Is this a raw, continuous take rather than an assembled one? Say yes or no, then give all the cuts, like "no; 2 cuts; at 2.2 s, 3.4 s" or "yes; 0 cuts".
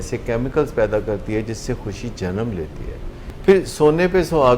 no; 1 cut; at 3.3 s